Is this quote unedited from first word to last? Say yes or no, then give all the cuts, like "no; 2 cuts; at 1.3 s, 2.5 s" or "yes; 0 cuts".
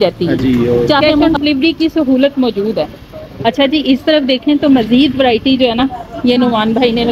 no; 1 cut; at 1.1 s